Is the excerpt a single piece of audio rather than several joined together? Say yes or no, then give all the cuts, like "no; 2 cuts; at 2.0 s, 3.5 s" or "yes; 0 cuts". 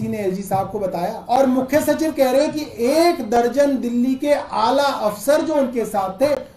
no; 1 cut; at 1.2 s